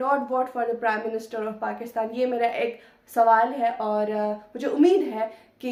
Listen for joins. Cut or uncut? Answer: uncut